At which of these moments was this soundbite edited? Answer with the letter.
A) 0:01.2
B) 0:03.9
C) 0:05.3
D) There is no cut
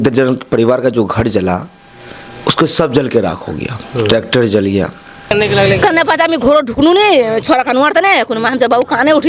C